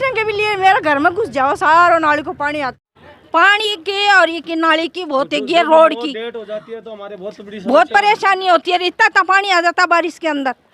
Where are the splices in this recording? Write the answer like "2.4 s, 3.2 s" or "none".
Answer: 2.8 s